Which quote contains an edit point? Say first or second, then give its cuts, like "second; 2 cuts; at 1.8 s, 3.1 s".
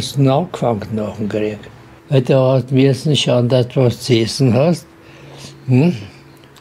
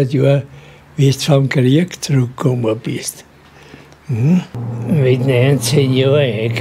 second; 1 cut; at 4.5 s